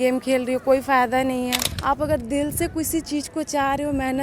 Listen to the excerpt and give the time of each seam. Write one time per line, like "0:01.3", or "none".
0:01.7